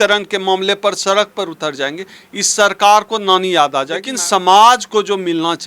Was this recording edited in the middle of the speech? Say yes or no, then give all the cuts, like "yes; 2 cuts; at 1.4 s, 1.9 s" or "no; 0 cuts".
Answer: yes; 1 cut; at 4.1 s